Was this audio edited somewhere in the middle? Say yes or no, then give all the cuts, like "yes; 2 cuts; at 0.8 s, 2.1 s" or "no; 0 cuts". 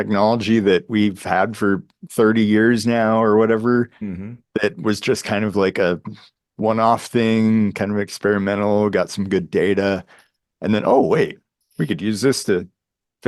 no; 0 cuts